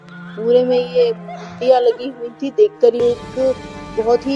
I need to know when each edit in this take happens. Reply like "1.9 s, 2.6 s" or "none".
3.0 s